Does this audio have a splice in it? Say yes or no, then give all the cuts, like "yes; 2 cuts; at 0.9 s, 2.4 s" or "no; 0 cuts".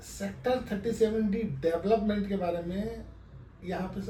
no; 0 cuts